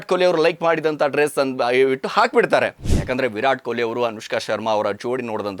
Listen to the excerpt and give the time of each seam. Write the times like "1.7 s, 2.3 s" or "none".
2.9 s

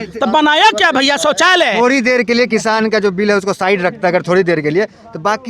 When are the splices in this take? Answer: none

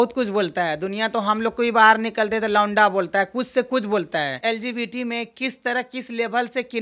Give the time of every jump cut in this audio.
4.4 s

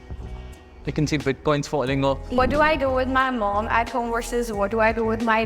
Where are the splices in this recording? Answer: 2.4 s

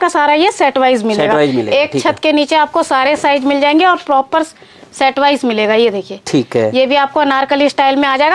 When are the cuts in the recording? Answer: none

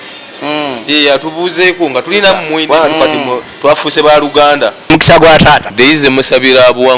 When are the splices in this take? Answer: 2.6 s, 4.9 s, 5.7 s

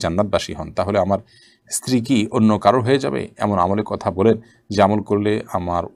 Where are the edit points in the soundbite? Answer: none

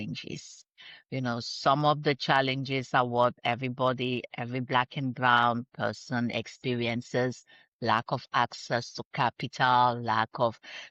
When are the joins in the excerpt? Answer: none

